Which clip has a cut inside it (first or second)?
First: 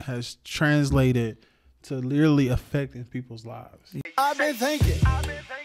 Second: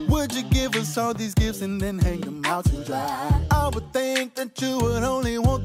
first